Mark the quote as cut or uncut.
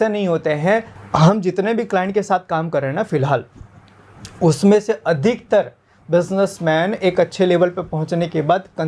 cut